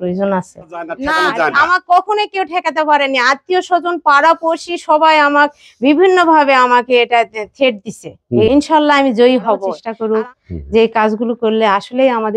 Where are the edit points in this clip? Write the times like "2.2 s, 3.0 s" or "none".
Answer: 1.0 s, 8.5 s, 9.7 s